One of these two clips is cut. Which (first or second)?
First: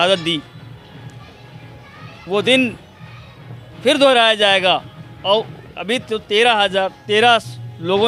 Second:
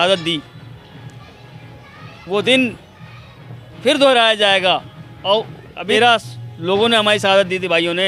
second